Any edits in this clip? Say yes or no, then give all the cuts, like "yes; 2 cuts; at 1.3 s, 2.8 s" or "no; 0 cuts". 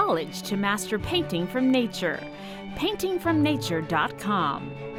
no; 0 cuts